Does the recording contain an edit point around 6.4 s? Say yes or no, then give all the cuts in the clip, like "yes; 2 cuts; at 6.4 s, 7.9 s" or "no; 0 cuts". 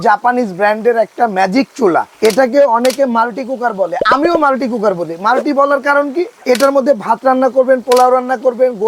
yes; 2 cuts; at 2.1 s, 6.4 s